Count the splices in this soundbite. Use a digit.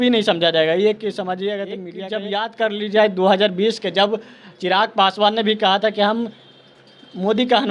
1